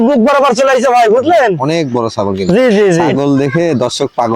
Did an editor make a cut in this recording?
yes; 1 cut; at 3.1 s

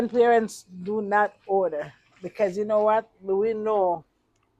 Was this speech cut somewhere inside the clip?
no; 0 cuts

